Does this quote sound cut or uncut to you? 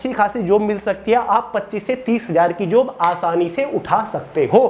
uncut